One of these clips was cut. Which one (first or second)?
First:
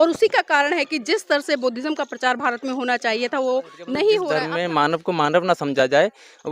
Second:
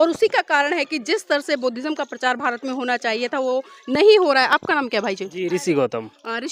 first